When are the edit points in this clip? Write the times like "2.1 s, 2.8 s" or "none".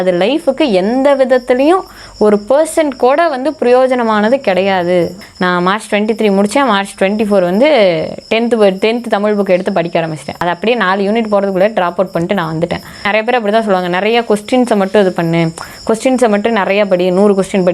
5.2 s, 10.4 s, 13.1 s